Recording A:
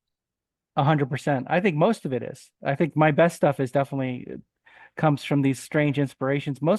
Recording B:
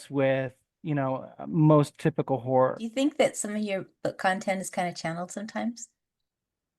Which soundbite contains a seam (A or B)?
B